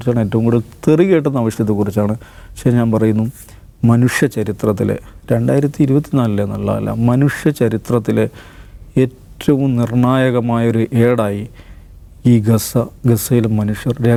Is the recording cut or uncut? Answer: uncut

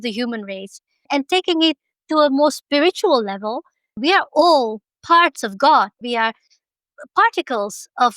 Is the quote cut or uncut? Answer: cut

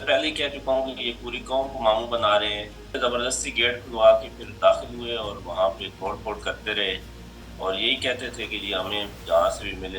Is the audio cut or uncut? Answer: cut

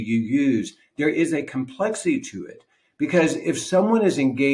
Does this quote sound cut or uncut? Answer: uncut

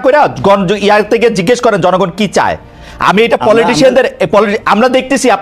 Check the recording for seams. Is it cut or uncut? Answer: uncut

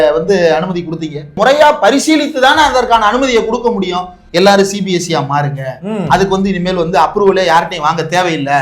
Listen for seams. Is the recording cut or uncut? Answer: cut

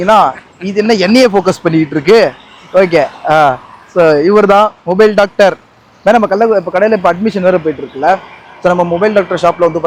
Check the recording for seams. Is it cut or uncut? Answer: uncut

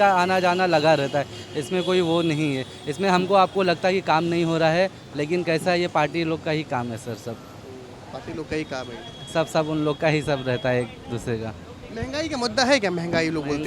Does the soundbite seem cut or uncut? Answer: uncut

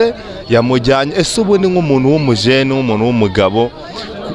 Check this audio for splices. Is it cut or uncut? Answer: uncut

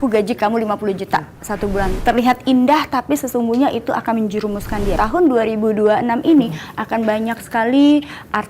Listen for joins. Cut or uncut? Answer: cut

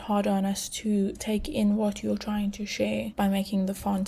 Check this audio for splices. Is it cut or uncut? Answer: cut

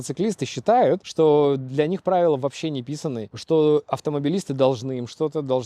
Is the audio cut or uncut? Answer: cut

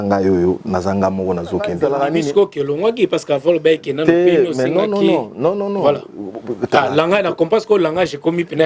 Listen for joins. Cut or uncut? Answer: cut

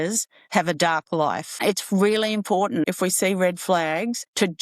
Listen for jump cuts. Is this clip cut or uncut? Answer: cut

